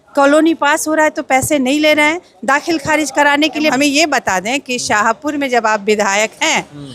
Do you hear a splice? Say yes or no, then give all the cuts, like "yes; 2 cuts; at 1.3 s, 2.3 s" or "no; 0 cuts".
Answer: yes; 1 cut; at 3.7 s